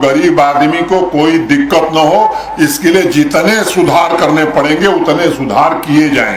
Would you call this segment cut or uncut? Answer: uncut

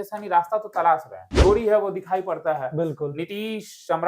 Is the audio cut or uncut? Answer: cut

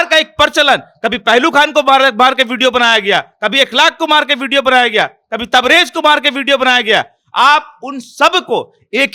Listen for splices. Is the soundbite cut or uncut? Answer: uncut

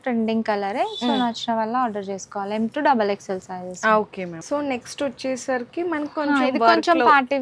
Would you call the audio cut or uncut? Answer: uncut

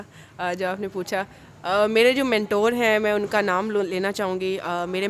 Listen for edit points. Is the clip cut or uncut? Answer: uncut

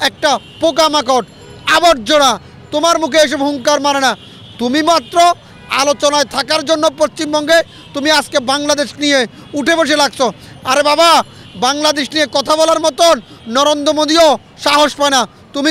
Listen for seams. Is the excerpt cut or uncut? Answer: uncut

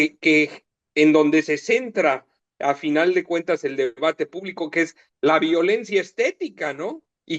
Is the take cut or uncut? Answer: uncut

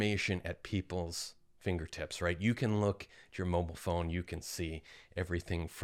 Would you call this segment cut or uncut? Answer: uncut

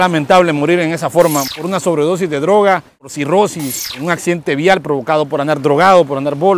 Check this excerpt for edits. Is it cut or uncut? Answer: cut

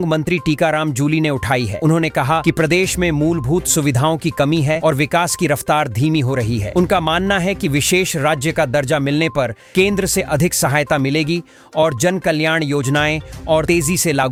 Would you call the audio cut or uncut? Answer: uncut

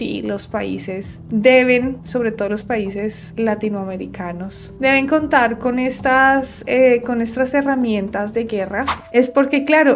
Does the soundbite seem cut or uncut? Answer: cut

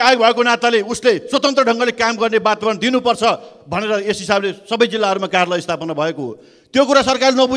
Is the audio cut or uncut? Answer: uncut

